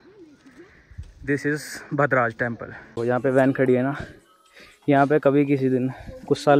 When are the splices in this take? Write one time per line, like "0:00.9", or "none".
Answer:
0:02.8